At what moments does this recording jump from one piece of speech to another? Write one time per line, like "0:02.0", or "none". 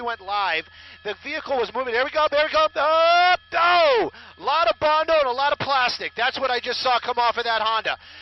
none